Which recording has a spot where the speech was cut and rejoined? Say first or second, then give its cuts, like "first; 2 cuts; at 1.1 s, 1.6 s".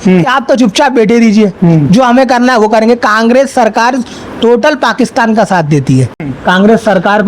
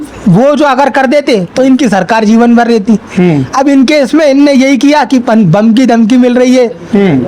first; 1 cut; at 6.2 s